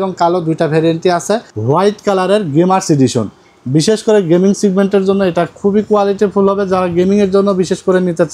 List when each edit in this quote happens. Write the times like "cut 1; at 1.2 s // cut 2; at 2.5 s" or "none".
cut 1; at 1.5 s